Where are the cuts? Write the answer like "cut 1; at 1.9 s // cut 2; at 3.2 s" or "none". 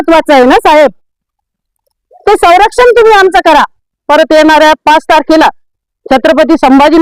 cut 1; at 4.0 s